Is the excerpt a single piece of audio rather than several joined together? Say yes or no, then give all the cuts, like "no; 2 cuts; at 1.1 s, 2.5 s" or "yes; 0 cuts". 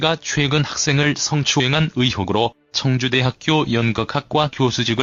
yes; 0 cuts